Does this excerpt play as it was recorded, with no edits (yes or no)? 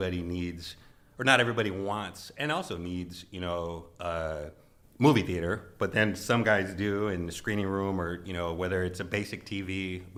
yes